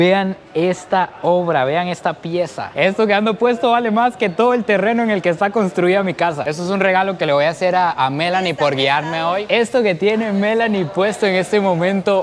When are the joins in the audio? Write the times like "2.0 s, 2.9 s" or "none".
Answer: 2.7 s, 6.4 s, 9.4 s